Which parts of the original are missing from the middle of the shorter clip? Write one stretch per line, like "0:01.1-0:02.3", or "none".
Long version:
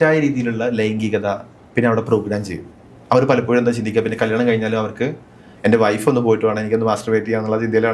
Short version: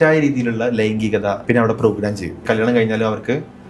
0:01.4-0:01.7
0:02.7-0:04.1